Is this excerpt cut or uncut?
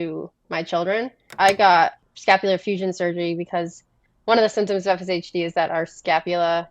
cut